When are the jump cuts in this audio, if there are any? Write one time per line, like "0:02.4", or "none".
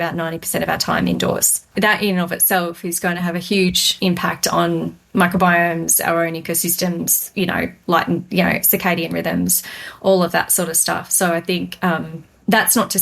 0:01.7
0:03.9